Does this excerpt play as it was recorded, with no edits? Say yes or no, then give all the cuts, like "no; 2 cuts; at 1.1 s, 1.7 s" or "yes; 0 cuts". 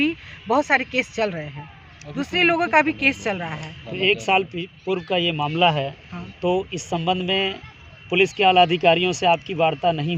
yes; 0 cuts